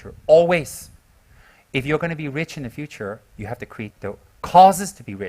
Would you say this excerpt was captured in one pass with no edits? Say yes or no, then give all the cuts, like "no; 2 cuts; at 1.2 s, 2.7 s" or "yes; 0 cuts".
no; 1 cut; at 3.9 s